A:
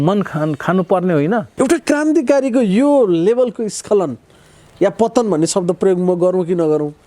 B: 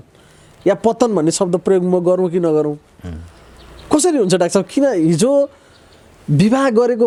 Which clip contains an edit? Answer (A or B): A